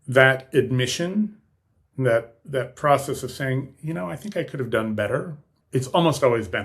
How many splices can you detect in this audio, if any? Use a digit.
1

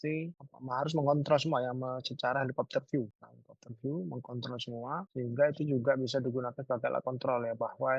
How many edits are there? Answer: 0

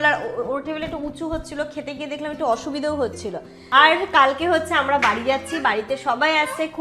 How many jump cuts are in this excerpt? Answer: 1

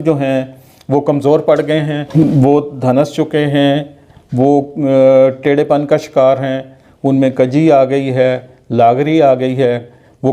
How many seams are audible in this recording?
1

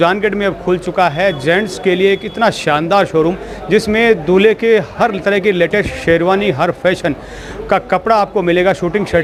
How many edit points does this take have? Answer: 0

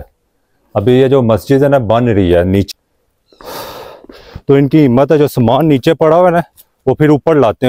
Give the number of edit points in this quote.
1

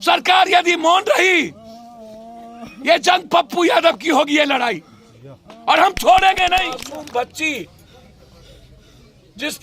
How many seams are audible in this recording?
1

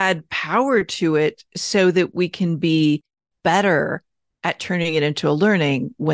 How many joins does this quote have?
0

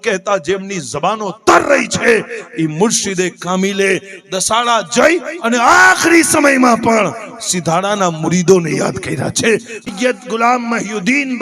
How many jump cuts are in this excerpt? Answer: 1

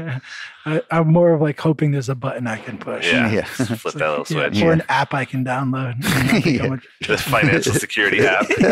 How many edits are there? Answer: 0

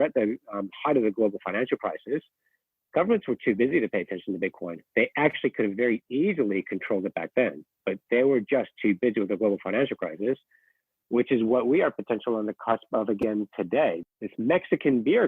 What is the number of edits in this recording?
1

